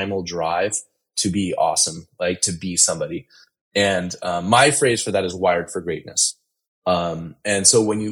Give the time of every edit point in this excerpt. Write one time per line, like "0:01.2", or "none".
none